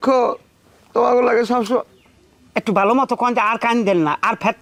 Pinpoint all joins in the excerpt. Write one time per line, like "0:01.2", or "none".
none